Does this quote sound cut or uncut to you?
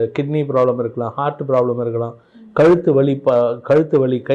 uncut